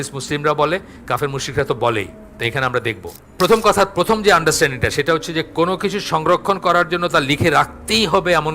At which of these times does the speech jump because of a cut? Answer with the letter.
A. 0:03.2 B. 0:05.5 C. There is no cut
A